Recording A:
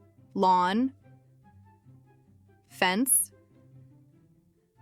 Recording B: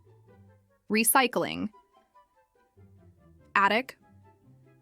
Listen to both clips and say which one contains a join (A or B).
B